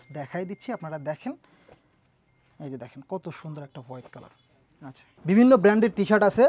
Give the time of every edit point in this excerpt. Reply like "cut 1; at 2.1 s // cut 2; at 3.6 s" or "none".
cut 1; at 5.1 s

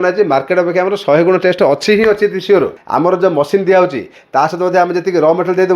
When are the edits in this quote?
cut 1; at 2.8 s

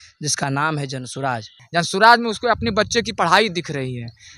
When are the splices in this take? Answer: cut 1; at 1.5 s

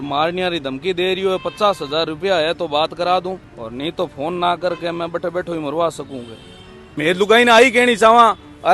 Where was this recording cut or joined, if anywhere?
cut 1; at 6.8 s

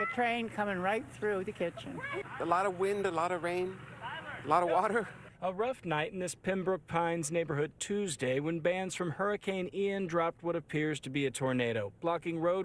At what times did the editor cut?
cut 1; at 2.0 s

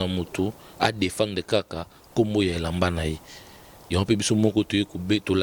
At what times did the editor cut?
none

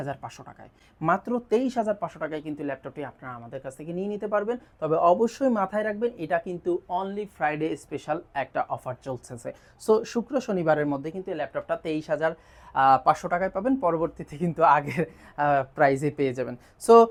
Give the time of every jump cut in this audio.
none

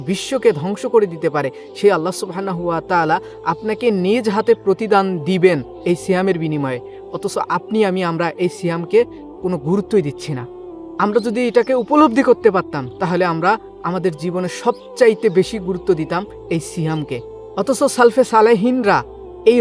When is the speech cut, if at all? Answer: none

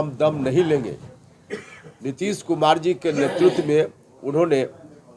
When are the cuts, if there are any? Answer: none

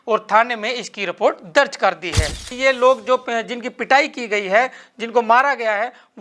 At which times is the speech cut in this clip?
cut 1; at 2.5 s

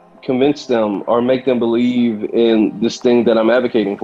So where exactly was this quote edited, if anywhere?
none

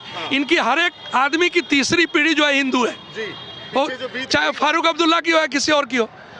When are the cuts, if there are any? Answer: none

